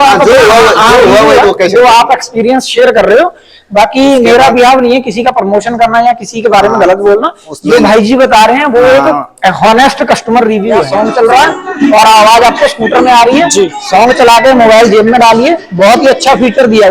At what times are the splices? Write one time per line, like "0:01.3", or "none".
0:10.8